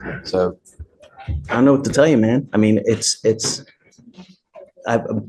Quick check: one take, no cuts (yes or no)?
yes